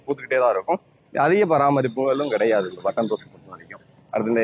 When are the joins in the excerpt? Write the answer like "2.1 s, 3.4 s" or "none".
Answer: none